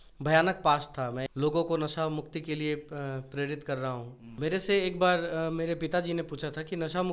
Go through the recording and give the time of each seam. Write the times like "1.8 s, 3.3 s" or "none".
1.3 s, 4.3 s